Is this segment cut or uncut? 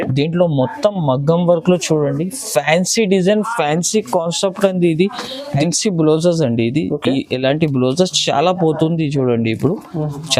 cut